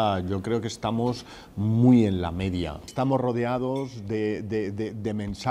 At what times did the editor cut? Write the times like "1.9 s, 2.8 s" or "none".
2.8 s

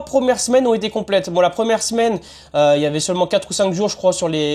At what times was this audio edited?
none

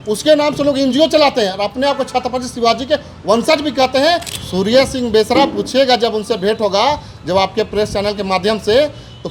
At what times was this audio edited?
4.3 s

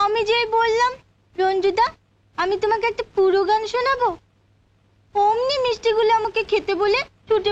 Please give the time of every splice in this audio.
none

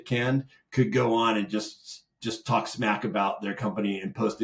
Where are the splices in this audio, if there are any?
none

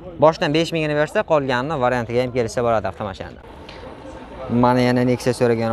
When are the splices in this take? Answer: 3.3 s

